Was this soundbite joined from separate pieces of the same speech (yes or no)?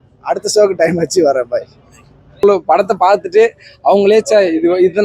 yes